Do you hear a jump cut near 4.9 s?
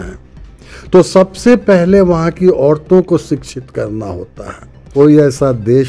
yes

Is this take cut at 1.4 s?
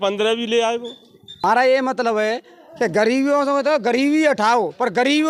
yes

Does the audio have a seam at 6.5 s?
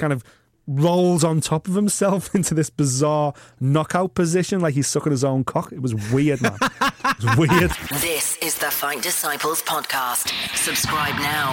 no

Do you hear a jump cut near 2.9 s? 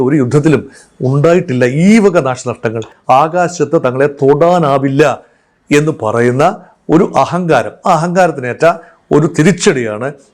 yes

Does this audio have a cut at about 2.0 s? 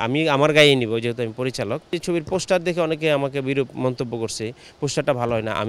yes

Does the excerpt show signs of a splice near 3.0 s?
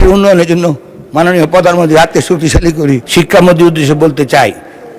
yes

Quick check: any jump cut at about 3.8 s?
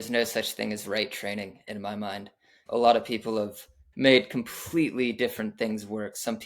yes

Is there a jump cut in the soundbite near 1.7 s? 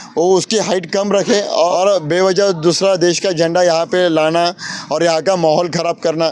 yes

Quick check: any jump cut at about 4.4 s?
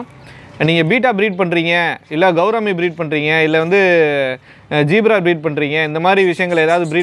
no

